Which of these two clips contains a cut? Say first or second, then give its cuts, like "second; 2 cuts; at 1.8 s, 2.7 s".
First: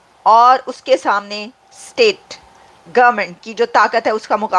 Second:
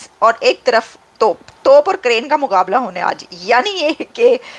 second; 1 cut; at 1.5 s